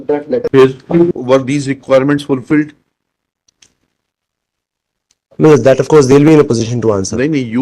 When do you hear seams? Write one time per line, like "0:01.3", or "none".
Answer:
0:01.1